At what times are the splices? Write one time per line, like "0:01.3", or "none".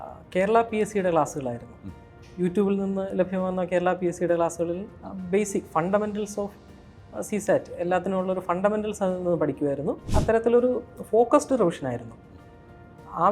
0:10.1